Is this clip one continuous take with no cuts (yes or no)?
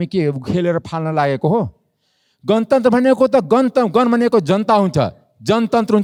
yes